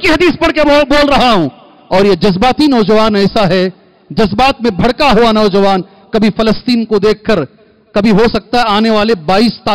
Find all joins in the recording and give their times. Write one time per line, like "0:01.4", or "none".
none